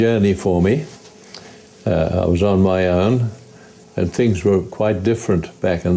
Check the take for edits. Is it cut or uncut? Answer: uncut